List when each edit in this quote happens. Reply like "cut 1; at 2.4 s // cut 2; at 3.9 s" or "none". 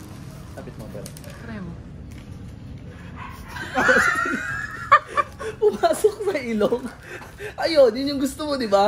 cut 1; at 3.3 s